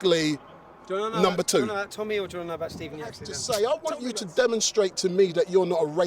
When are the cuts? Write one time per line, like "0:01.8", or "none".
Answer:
0:03.3